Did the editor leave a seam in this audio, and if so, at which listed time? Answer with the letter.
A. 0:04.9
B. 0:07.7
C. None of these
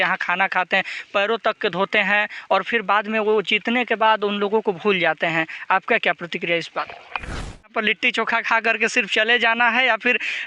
B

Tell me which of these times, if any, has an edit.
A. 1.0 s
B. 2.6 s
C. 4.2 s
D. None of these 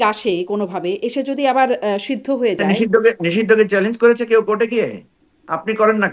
B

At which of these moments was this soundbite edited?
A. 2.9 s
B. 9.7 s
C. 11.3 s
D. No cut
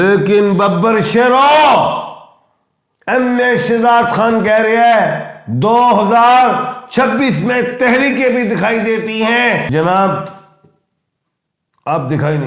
B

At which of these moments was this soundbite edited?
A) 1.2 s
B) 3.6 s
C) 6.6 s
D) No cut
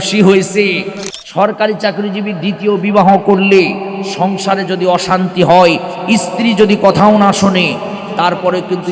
A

